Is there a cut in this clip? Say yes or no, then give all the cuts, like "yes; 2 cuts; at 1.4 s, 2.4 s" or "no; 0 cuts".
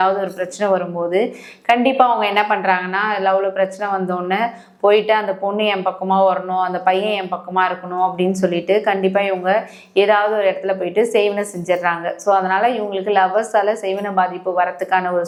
no; 0 cuts